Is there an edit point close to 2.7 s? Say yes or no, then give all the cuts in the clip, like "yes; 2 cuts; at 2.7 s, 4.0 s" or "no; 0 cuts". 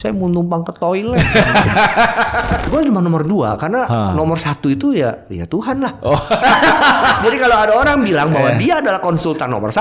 yes; 2 cuts; at 2.7 s, 7.2 s